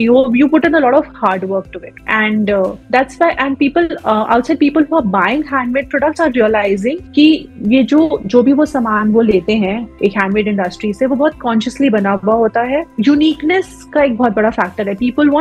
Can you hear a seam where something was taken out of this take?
yes; 1 cut; at 12.9 s

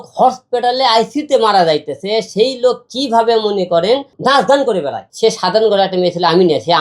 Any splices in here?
yes; 2 cuts; at 4.1 s, 5.0 s

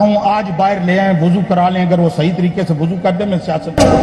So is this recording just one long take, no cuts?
yes; 0 cuts

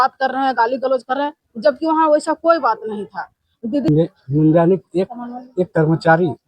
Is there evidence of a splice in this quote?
yes; 1 cut; at 3.9 s

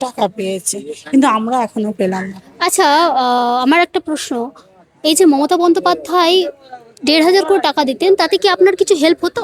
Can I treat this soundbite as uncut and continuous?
yes; 0 cuts

